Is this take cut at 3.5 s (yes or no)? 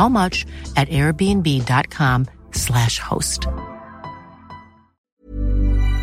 no